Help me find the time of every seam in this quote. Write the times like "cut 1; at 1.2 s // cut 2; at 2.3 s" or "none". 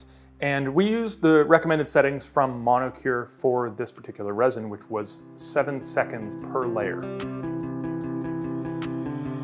cut 1; at 6.9 s // cut 2; at 8.5 s